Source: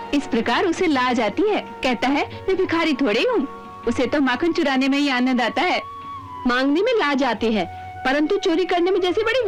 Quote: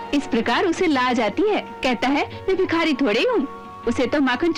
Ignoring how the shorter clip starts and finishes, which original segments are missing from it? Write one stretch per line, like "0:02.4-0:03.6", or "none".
none